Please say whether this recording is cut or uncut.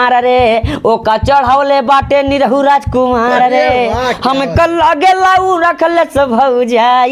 uncut